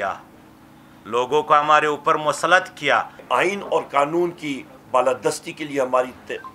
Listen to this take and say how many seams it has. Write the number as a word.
one